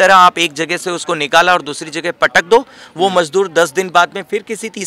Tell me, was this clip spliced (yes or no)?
no